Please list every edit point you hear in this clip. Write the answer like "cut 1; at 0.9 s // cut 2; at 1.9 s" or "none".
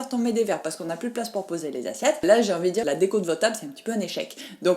cut 1; at 2.2 s